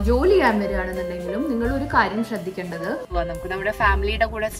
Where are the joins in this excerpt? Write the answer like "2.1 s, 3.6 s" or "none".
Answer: 3.1 s